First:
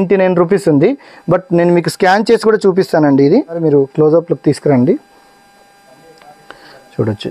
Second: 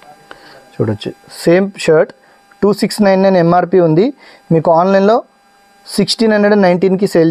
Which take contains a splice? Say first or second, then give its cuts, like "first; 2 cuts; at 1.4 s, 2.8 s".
first; 1 cut; at 3.6 s